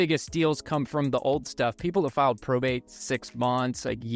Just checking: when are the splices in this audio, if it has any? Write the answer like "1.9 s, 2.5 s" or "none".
none